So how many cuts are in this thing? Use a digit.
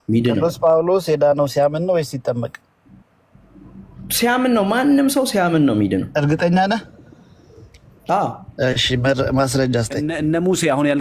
1